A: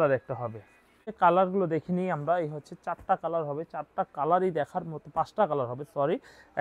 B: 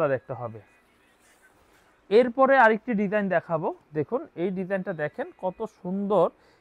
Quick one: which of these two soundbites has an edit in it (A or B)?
A